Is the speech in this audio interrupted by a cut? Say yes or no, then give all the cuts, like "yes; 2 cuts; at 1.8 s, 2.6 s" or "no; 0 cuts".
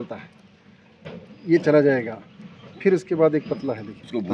no; 0 cuts